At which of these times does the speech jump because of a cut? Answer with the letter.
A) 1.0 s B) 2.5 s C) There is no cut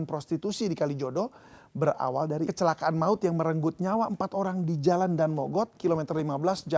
B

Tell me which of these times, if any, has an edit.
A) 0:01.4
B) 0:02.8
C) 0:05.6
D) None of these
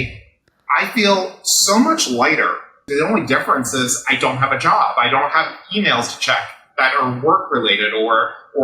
B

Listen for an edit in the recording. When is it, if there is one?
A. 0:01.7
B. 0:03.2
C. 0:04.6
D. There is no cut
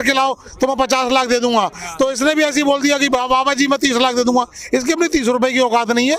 D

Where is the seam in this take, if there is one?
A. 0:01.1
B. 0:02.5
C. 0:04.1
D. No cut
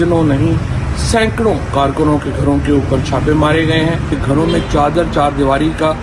C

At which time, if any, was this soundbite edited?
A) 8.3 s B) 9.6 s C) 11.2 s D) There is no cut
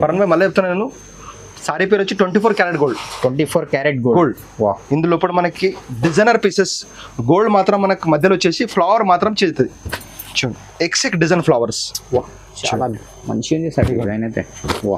D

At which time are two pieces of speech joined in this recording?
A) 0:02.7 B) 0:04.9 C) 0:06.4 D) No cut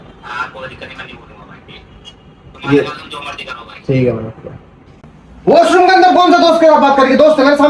B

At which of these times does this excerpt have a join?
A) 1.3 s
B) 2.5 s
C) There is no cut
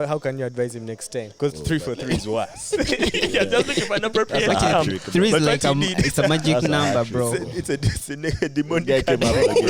A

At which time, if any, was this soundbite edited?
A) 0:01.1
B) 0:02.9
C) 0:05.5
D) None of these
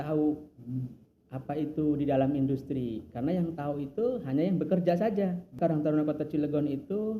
C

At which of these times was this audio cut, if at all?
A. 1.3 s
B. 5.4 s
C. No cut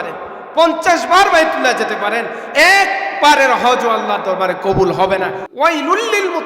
B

